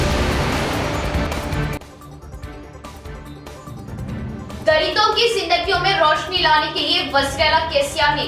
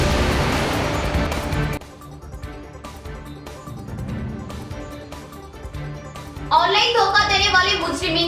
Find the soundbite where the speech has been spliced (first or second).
first